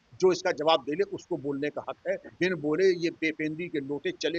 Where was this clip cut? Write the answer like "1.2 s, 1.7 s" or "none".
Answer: 2.3 s